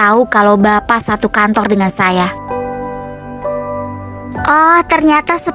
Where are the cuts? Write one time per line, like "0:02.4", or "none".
none